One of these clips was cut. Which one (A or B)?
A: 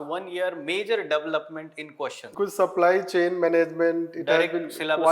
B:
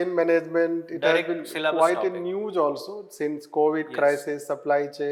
A